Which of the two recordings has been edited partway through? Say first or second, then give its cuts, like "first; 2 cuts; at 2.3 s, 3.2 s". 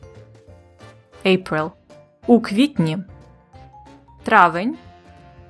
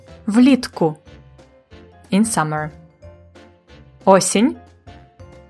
second; 1 cut; at 4.6 s